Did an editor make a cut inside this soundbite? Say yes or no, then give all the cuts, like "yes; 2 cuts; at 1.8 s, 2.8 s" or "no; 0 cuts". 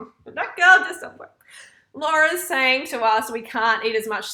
no; 0 cuts